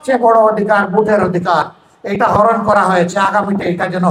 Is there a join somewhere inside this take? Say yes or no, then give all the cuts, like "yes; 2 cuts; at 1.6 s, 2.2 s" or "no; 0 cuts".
no; 0 cuts